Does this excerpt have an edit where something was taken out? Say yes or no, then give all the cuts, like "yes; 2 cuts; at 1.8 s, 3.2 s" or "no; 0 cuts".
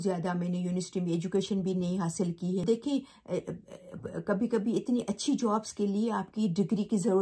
yes; 1 cut; at 2.6 s